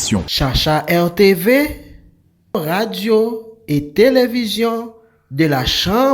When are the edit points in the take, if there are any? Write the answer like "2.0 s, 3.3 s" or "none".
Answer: 2.5 s